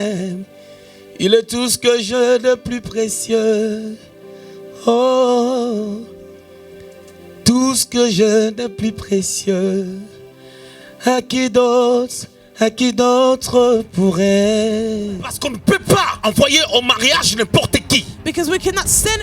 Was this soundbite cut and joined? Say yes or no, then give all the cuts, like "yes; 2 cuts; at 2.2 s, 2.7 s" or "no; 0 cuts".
yes; 1 cut; at 15.4 s